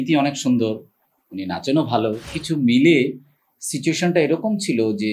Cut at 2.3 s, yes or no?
yes